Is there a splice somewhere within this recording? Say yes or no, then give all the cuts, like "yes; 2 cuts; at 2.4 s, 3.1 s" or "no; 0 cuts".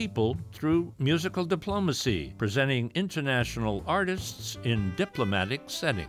yes; 1 cut; at 2.3 s